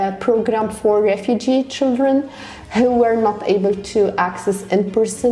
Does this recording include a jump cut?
no; 0 cuts

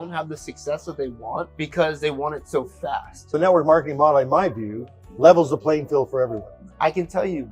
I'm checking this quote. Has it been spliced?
yes; 2 cuts; at 3.3 s, 6.7 s

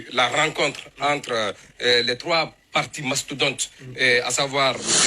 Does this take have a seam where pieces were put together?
yes; 1 cut; at 1.2 s

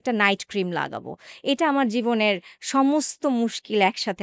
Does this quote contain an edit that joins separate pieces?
no; 0 cuts

